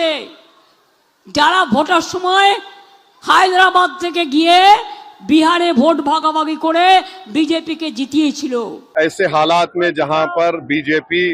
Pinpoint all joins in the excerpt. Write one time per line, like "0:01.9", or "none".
0:08.9